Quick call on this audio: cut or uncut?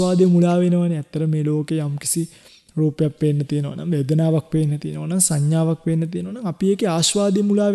uncut